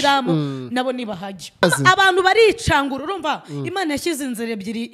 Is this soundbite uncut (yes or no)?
no